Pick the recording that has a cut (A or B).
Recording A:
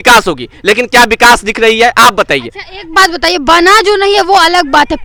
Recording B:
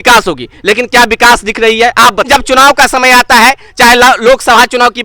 B